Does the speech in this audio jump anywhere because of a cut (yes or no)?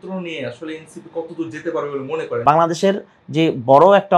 yes